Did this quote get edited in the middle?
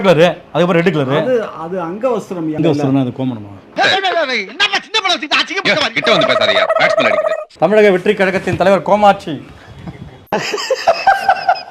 yes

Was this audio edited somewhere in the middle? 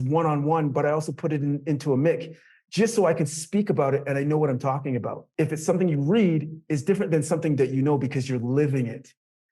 yes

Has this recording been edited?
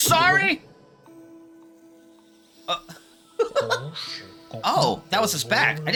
no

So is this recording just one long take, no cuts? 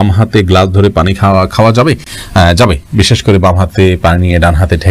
yes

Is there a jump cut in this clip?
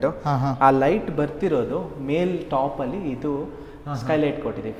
no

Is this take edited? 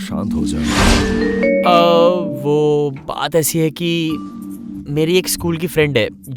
yes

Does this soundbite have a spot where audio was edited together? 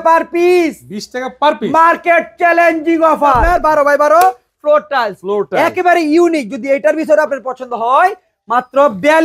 yes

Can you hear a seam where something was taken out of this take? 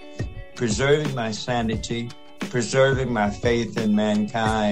yes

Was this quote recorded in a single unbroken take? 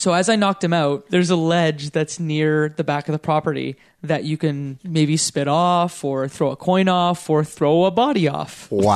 no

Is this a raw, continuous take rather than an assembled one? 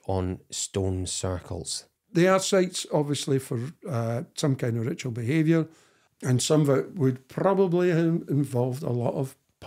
no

